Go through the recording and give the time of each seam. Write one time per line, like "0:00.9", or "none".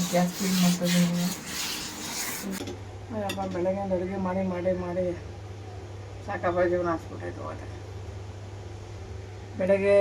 0:02.6